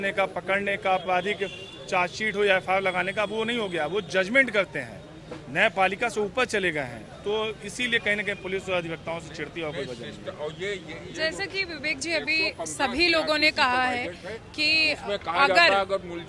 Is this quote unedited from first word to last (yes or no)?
yes